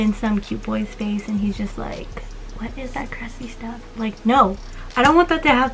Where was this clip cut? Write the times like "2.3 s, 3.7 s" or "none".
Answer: none